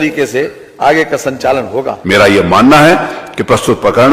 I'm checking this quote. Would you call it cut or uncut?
cut